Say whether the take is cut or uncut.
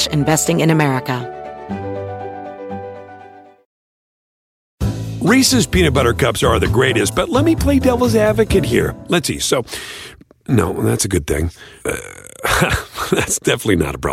cut